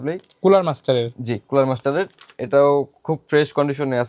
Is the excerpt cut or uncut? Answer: uncut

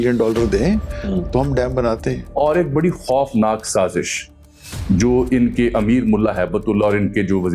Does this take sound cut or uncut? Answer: cut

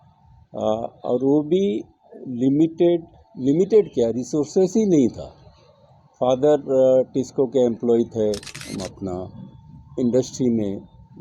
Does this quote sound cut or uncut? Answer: cut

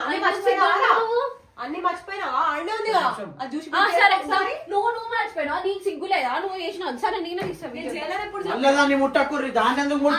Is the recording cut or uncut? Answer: uncut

